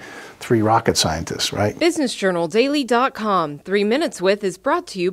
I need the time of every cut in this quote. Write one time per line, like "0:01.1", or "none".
0:01.7